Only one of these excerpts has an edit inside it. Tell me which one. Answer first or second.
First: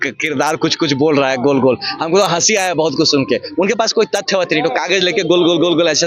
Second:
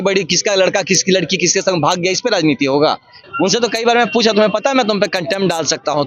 second